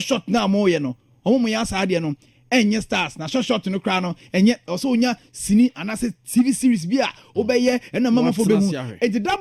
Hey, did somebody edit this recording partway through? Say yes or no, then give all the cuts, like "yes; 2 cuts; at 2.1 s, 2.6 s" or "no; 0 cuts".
no; 0 cuts